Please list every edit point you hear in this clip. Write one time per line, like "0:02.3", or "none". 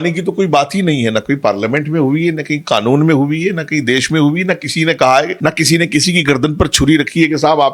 0:05.3